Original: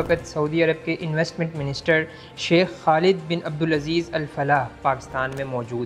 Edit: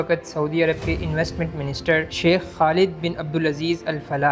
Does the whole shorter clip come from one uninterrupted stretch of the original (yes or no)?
no